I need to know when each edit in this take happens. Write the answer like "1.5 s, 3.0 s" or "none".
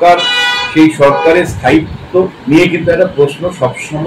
2.4 s